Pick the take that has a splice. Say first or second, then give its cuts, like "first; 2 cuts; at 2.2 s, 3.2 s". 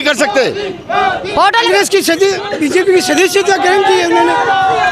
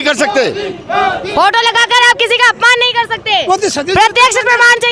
first; 1 cut; at 1.7 s